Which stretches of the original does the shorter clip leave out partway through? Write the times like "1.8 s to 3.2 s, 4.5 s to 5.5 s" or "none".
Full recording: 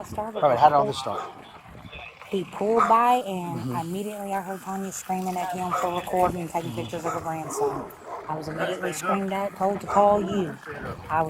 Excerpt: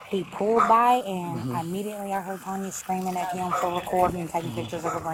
none